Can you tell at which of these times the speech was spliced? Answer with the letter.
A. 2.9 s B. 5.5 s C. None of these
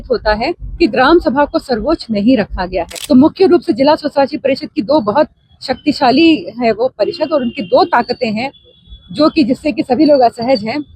A